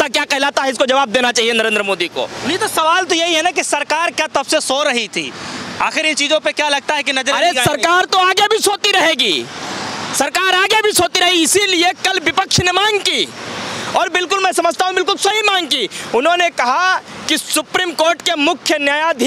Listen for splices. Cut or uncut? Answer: uncut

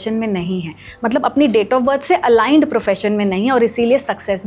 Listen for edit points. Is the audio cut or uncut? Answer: uncut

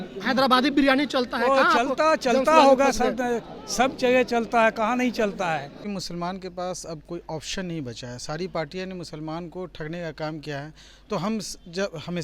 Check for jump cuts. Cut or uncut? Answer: cut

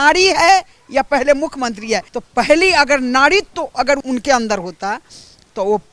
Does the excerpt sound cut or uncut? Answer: cut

